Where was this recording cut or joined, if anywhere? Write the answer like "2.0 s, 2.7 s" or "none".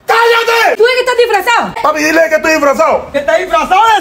0.8 s, 1.8 s, 3.1 s